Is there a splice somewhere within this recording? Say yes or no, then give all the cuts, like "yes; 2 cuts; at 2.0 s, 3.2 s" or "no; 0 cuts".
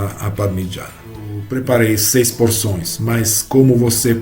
yes; 1 cut; at 1.4 s